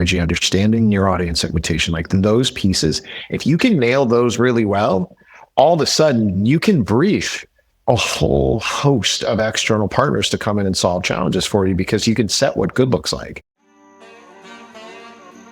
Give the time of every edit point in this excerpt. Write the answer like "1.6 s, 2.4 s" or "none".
13.8 s